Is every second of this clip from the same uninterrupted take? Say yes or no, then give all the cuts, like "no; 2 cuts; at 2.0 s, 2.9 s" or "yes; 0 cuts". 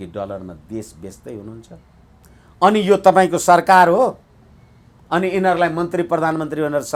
yes; 0 cuts